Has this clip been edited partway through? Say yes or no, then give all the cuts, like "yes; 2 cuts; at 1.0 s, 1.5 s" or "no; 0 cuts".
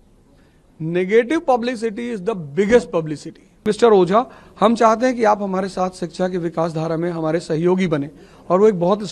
yes; 1 cut; at 3.6 s